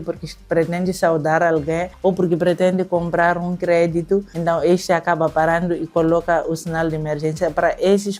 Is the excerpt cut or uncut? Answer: uncut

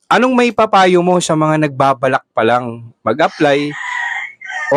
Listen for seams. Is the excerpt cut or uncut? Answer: uncut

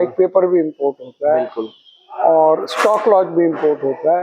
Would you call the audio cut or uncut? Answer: uncut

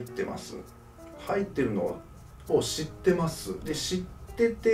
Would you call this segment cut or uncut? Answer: uncut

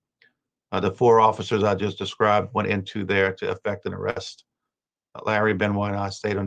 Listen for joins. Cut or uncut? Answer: uncut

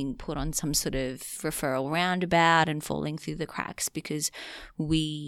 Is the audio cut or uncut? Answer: uncut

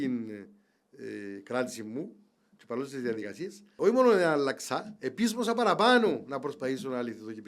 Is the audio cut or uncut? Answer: cut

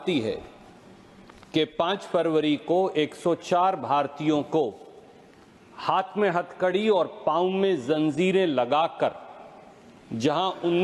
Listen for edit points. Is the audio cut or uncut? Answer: uncut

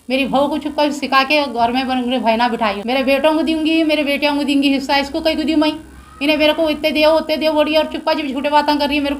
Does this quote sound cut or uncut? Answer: cut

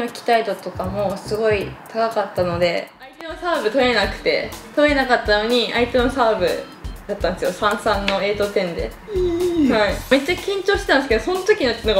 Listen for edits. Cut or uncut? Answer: cut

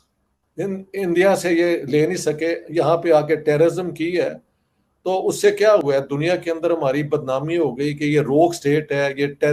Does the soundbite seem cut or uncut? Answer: uncut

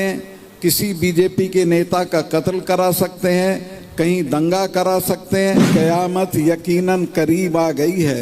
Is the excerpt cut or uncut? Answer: cut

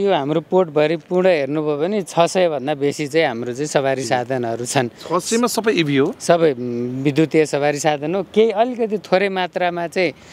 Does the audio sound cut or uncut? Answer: uncut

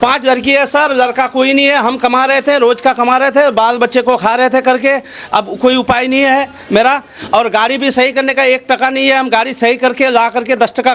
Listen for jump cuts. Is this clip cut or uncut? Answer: uncut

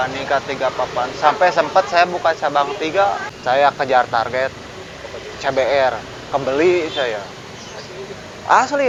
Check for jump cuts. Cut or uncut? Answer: uncut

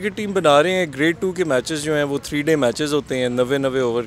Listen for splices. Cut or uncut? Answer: uncut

